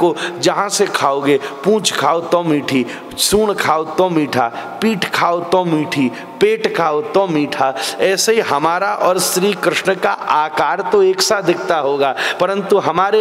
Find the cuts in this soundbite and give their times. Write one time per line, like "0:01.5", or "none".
none